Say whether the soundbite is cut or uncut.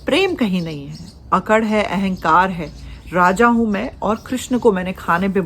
uncut